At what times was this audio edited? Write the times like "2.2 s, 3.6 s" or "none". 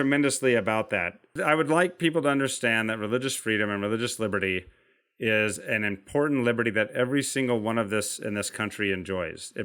1.2 s